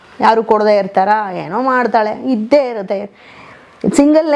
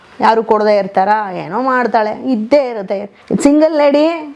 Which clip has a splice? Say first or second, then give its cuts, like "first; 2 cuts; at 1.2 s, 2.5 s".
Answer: second; 1 cut; at 3.1 s